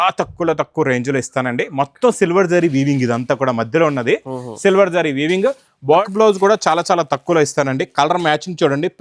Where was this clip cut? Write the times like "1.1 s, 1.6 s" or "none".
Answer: 6.0 s